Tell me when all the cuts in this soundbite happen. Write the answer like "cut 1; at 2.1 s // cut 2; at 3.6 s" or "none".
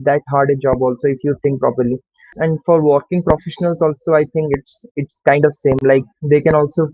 cut 1; at 2.3 s